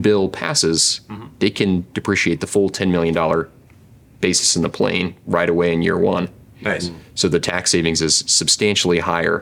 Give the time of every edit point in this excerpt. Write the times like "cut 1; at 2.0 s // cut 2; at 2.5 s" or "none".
none